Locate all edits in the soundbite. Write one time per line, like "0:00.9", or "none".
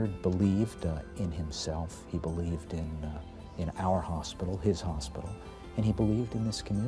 none